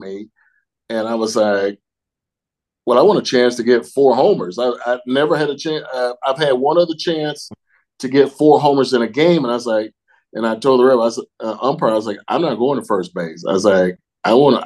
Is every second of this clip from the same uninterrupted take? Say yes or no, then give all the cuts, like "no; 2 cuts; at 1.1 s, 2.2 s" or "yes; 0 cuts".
yes; 0 cuts